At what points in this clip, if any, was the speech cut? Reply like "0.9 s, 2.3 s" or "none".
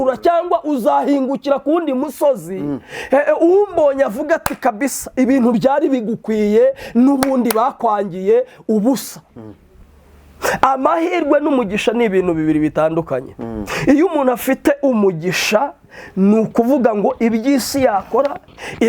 none